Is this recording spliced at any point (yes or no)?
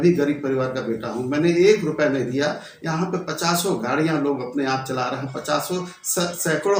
no